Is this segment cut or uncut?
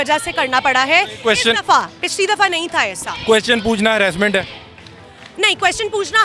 uncut